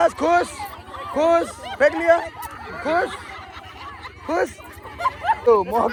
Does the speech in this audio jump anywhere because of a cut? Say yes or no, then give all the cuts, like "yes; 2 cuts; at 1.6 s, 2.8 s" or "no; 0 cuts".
no; 0 cuts